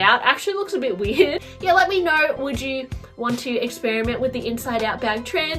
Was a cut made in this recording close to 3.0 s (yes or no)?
no